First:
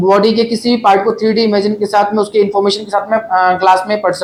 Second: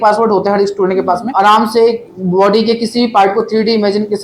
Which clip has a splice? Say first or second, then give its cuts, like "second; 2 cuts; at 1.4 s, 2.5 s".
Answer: second; 1 cut; at 1.3 s